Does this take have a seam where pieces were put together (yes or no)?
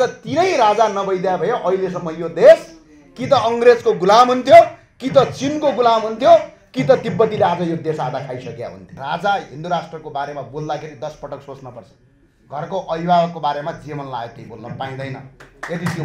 yes